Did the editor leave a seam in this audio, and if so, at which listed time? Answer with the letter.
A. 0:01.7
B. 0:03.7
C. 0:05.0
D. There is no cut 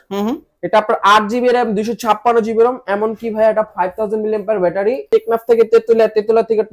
C